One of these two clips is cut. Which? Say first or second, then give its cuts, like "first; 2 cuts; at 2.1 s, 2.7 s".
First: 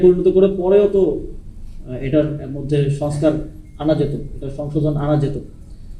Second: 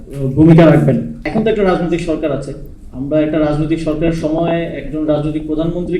second; 1 cut; at 1.3 s